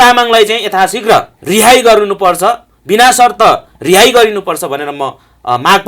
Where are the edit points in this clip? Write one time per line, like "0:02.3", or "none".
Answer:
0:01.4